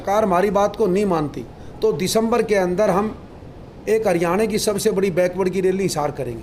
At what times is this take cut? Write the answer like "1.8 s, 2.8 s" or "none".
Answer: none

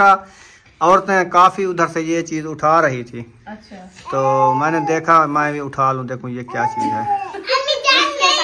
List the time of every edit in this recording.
none

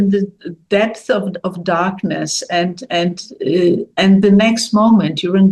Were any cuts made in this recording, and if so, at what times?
none

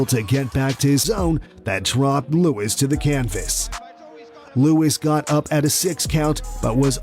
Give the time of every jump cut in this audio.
1.0 s

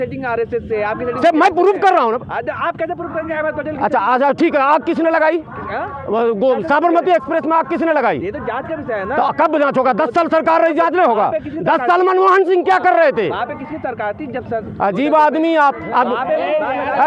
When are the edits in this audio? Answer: none

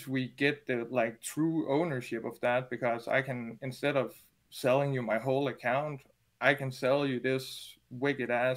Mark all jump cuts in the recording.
none

